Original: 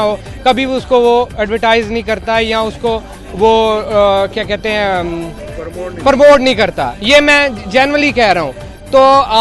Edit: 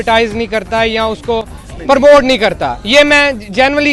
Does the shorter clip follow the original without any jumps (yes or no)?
no